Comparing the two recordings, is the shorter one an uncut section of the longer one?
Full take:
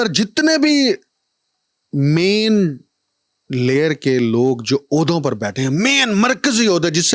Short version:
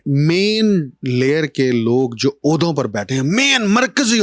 no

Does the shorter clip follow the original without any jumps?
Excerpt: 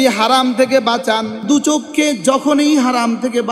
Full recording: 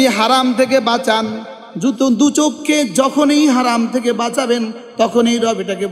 no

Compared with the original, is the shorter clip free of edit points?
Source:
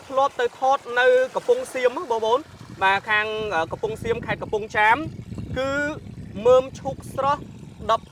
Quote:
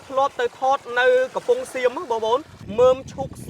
no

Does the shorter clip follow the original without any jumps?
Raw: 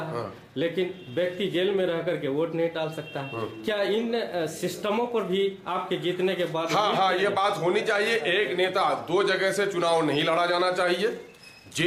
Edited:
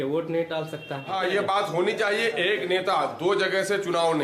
no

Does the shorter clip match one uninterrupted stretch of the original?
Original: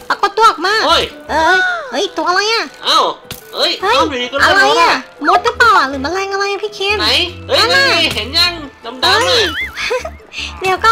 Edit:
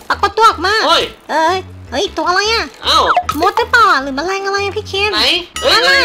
no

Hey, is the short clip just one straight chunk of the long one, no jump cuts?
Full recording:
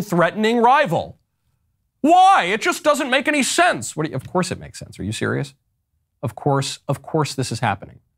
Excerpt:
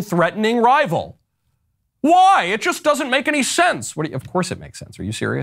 yes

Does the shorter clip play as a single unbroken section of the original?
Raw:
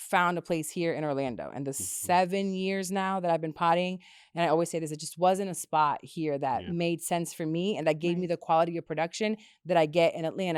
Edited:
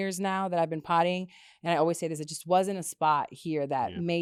yes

